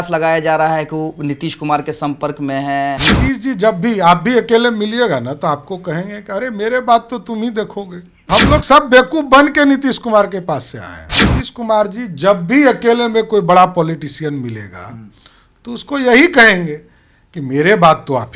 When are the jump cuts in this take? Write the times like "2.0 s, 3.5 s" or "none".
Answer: 3.0 s, 8.3 s

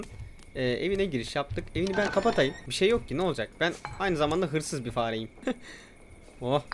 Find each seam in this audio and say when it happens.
2.6 s, 5.4 s

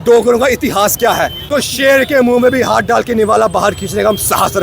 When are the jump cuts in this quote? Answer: 1.0 s

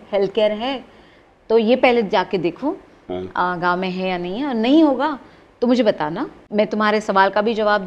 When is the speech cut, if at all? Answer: 6.4 s

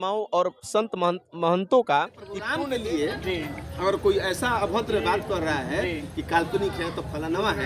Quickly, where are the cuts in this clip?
2.6 s

